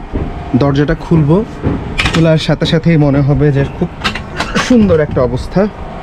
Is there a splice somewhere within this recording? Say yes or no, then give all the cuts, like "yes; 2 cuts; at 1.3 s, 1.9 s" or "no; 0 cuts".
no; 0 cuts